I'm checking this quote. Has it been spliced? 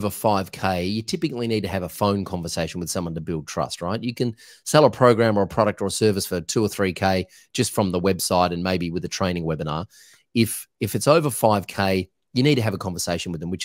no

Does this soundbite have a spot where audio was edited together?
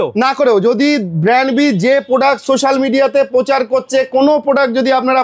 no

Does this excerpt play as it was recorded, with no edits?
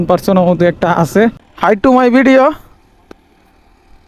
no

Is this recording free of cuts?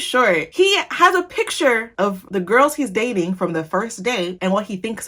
yes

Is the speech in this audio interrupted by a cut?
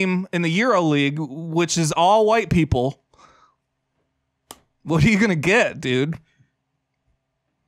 no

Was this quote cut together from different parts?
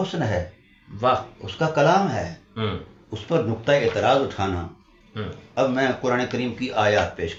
no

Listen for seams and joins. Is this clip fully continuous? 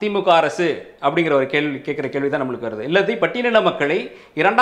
yes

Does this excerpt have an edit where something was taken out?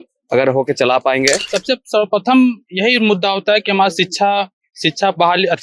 yes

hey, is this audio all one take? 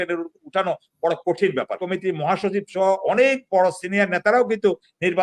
no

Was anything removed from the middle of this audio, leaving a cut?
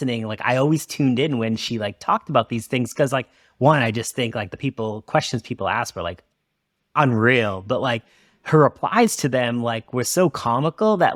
no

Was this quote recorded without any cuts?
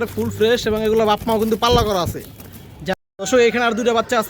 no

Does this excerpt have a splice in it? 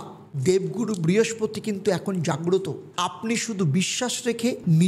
no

